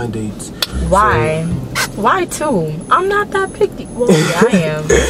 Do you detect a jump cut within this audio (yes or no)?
no